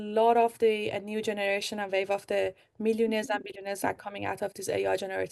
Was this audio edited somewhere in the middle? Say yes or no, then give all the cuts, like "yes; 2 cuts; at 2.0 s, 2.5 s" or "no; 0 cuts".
no; 0 cuts